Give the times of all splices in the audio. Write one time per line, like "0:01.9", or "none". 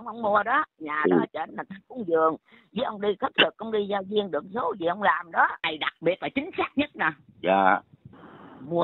0:05.7